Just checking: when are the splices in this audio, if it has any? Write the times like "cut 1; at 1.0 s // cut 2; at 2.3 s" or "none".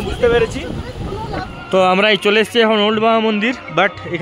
cut 1; at 1.6 s